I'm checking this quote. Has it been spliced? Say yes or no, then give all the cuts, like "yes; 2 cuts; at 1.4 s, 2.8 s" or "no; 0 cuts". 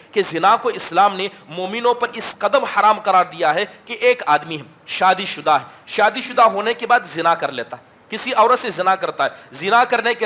no; 0 cuts